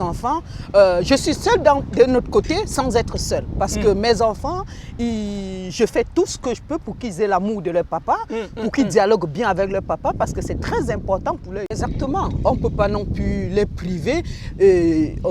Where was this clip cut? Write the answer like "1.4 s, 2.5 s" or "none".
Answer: 11.8 s